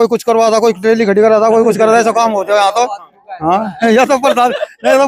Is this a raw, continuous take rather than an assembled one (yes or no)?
yes